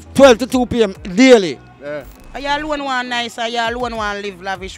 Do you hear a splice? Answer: yes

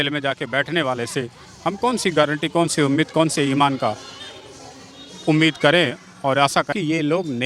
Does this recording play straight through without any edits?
no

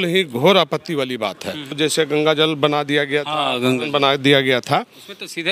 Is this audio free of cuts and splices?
no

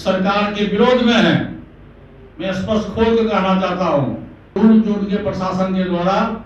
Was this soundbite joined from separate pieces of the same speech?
yes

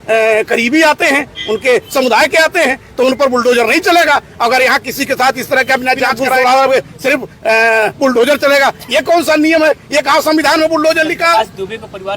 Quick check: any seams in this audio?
yes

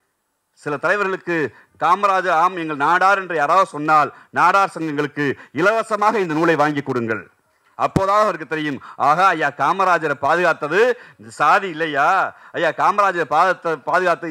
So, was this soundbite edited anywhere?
no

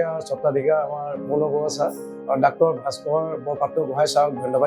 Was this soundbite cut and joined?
no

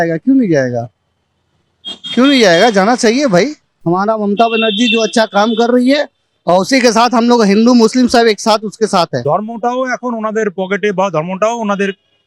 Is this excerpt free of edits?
no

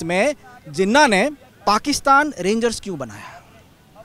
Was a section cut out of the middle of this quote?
yes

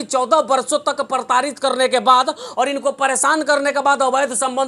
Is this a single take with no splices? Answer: yes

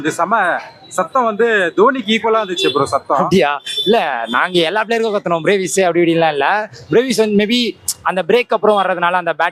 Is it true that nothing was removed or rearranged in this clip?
yes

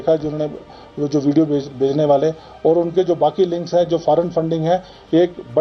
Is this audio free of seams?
yes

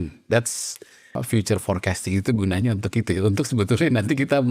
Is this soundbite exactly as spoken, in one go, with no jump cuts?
no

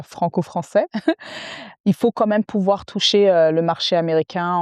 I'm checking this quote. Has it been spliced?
no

